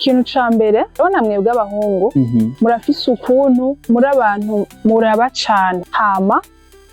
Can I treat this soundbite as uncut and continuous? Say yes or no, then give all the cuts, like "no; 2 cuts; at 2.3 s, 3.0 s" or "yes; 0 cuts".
no; 4 cuts; at 1.0 s, 2.5 s, 3.8 s, 5.9 s